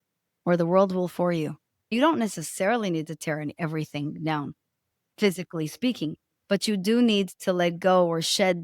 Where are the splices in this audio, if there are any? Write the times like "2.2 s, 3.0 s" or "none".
1.9 s